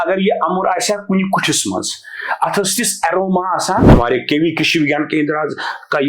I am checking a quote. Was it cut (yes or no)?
yes